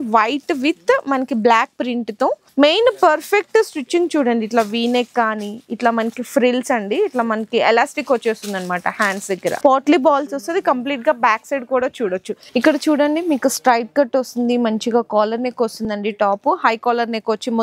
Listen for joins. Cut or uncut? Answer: cut